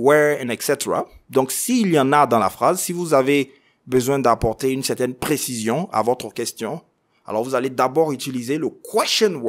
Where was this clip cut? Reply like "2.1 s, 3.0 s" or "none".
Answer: none